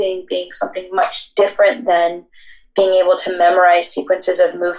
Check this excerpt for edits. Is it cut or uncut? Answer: uncut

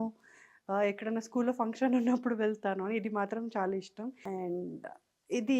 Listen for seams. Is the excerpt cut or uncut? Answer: cut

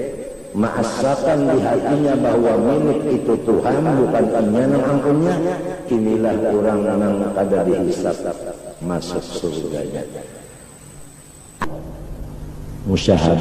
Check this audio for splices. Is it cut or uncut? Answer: cut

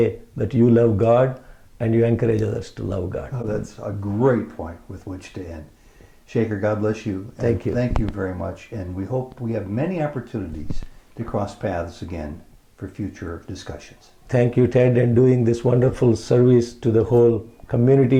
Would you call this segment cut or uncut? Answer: uncut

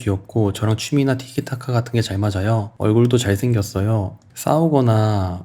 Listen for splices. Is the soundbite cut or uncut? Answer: uncut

